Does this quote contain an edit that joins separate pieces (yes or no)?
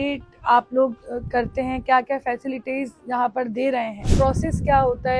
yes